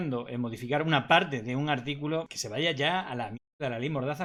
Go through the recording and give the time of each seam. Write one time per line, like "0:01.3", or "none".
none